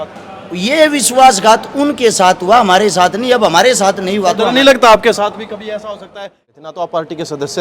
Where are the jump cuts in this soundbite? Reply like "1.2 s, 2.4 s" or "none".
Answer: 6.0 s